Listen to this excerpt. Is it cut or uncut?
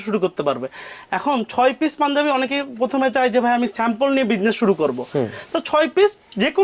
uncut